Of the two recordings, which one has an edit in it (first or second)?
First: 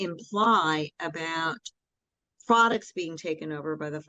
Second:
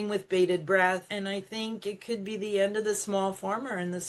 second